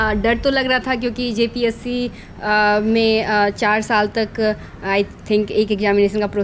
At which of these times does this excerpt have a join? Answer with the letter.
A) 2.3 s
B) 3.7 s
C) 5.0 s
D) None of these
D